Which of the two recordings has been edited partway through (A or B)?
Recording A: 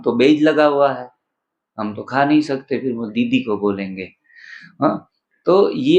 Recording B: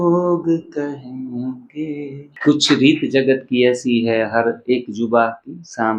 B